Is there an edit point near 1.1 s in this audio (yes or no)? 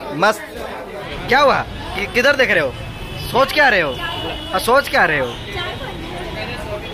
yes